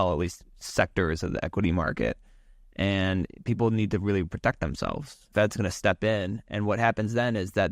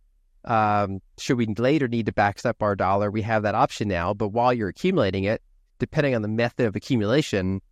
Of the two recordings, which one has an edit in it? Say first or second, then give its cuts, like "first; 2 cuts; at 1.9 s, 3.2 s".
first; 1 cut; at 5.3 s